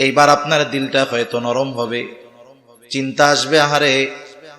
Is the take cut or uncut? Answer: uncut